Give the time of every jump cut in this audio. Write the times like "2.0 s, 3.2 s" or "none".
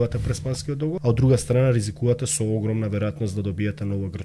1.0 s